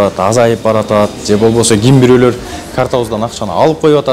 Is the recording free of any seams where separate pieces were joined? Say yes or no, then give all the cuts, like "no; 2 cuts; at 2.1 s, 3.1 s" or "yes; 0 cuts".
yes; 0 cuts